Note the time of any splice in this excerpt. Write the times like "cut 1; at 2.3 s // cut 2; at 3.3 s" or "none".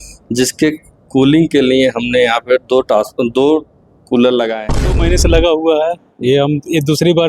cut 1; at 5.0 s